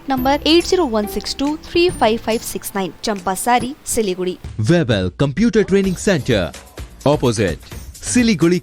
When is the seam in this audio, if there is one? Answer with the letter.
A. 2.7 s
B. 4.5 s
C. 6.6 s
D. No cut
B